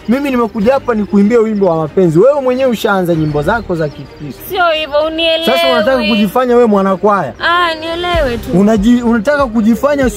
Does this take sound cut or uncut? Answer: uncut